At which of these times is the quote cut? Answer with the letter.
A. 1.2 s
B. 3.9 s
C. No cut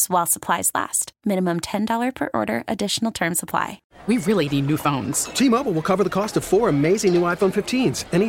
B